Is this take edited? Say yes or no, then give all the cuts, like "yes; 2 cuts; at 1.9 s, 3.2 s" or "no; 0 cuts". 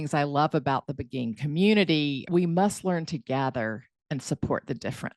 no; 0 cuts